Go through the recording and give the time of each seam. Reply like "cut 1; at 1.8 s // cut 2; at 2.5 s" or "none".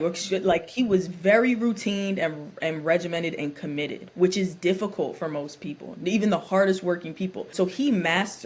none